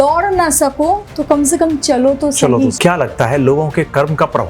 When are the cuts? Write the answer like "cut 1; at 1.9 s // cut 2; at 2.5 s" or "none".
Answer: cut 1; at 1.1 s // cut 2; at 2.8 s